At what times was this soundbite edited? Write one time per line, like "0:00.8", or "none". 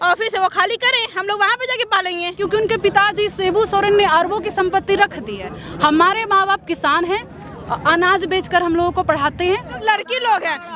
0:02.4
0:09.7